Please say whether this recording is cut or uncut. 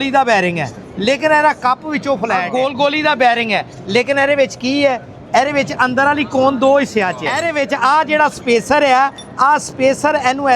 cut